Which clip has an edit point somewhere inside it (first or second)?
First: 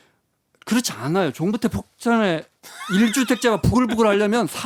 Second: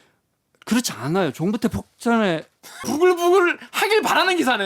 second